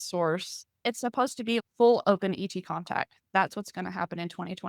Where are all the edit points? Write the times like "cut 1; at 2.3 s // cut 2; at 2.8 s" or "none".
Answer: cut 1; at 1.1 s